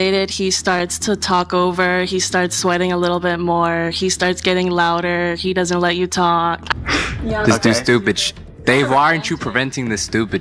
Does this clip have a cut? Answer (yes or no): yes